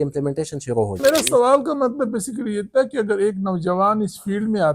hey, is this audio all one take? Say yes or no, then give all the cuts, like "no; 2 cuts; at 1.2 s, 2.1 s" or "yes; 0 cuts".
no; 1 cut; at 1.0 s